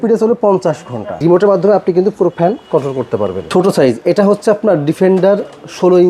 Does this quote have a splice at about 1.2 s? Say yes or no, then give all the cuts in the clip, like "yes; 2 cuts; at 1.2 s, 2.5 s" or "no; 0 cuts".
yes; 2 cuts; at 1.2 s, 3.4 s